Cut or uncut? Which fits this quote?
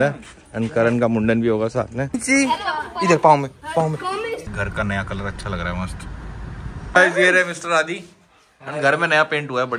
cut